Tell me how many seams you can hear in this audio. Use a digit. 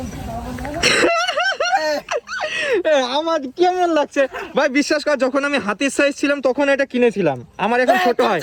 0